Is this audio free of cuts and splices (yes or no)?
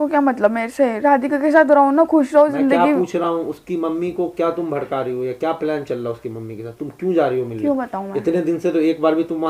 yes